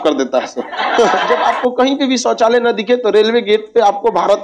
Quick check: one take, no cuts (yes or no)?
no